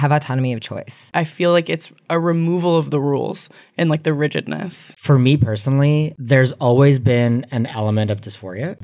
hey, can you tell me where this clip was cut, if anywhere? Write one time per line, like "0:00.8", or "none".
0:01.1
0:05.0